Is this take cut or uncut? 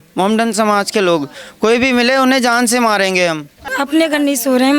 cut